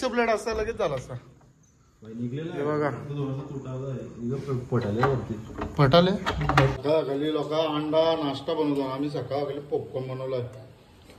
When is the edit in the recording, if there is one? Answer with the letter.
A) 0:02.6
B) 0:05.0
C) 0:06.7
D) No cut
C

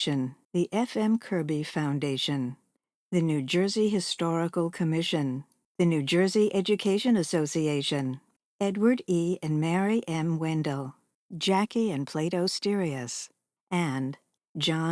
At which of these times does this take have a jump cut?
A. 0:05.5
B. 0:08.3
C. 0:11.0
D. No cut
D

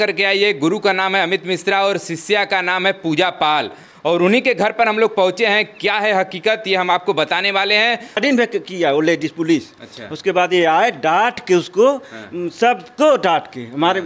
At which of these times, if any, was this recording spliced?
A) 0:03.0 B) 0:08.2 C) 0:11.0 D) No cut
B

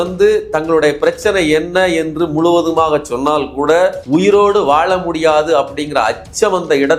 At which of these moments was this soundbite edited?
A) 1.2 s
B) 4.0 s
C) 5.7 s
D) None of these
B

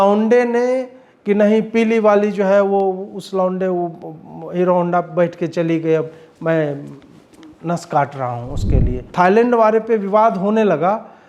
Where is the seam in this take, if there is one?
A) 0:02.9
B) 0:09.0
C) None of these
B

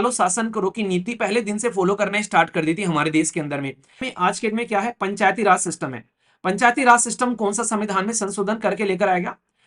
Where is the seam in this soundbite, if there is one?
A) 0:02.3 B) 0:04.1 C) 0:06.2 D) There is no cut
B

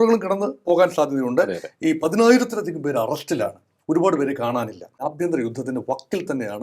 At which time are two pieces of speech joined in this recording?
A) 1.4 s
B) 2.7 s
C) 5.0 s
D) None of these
C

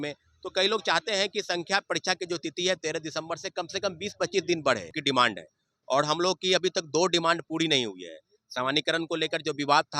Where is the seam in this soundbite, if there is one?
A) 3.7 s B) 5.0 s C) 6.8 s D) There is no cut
B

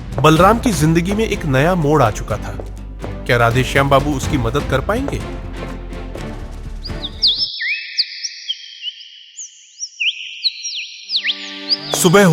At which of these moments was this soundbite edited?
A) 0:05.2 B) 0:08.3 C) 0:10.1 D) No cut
D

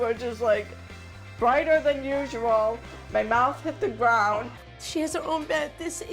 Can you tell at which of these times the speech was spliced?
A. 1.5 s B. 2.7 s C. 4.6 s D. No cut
C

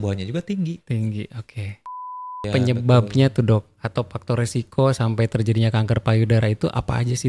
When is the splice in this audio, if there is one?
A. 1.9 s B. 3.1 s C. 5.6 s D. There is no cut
A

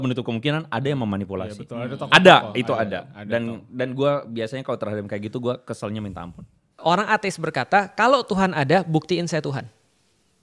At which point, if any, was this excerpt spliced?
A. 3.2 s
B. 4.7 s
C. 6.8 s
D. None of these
C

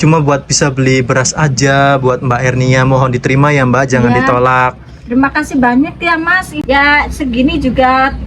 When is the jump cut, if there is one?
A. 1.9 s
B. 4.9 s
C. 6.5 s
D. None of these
C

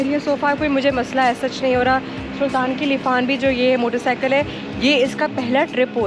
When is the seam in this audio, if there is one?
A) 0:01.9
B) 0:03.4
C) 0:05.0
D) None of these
D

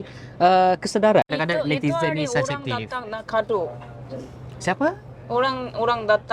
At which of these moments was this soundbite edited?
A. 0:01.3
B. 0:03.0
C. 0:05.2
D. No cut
A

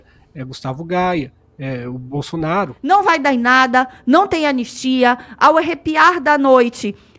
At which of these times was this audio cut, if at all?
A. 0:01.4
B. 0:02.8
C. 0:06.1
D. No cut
B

